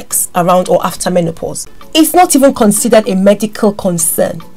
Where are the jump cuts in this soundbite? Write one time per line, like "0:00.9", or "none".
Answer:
0:01.8